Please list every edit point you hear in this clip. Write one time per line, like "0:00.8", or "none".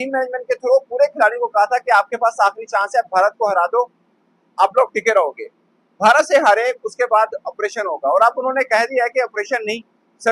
none